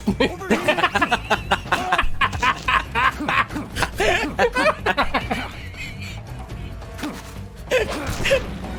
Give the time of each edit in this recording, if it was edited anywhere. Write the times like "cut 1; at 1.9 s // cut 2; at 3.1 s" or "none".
none